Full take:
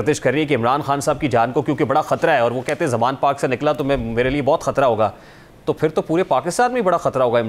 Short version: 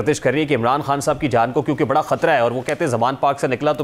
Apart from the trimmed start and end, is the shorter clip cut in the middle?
no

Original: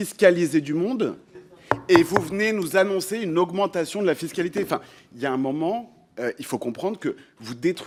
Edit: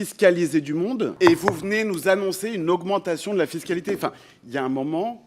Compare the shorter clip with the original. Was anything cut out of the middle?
yes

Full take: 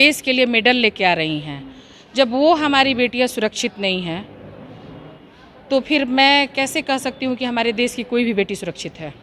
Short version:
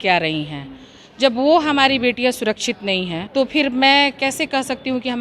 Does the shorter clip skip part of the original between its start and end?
yes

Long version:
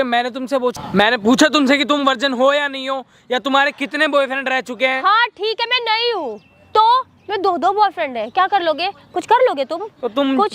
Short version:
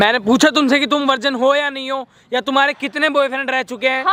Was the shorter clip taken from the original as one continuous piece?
yes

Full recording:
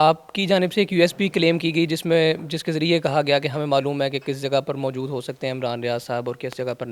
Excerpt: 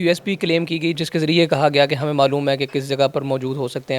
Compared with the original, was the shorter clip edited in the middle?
yes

